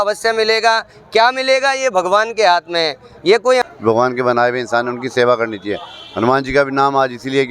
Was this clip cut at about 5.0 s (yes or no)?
no